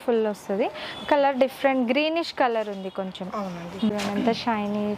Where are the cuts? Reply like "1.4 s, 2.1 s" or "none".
3.9 s